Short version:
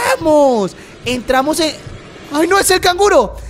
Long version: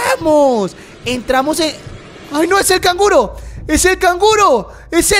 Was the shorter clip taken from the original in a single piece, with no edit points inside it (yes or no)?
yes